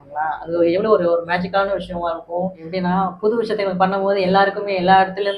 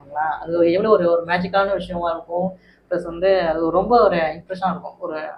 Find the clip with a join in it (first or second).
first